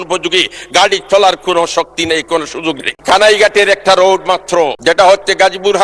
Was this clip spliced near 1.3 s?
no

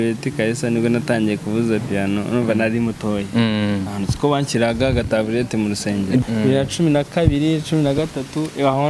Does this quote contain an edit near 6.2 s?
yes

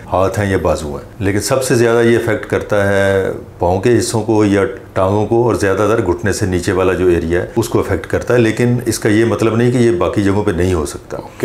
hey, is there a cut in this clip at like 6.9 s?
no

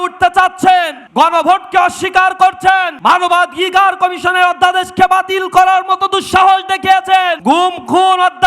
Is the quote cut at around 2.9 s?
yes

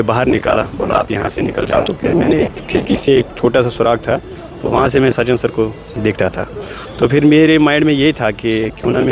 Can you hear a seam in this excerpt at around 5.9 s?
yes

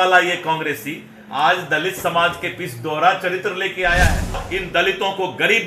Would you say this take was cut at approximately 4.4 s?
yes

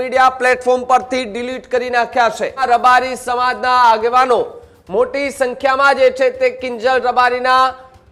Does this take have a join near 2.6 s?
yes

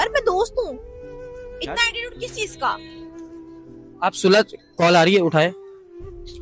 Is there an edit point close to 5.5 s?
yes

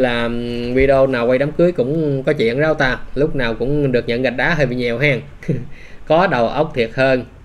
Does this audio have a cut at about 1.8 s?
no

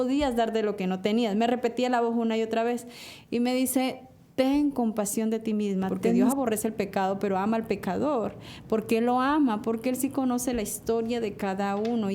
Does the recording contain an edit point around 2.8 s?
no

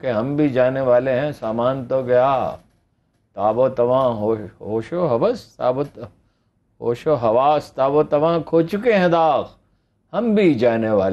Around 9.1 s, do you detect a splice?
no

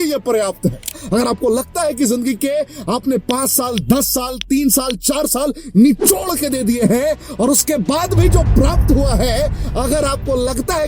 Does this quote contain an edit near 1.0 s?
yes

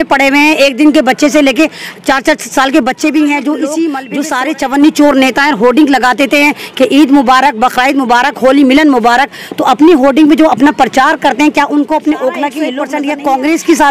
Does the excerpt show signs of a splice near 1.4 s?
no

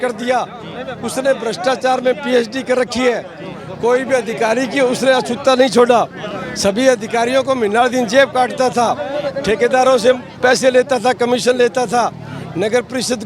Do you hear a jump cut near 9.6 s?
no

